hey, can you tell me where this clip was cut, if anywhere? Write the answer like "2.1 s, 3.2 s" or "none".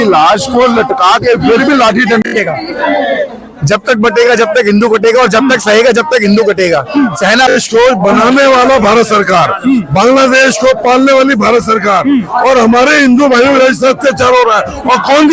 2.3 s, 7.6 s